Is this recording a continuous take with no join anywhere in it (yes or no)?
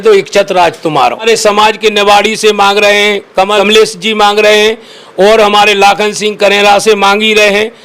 no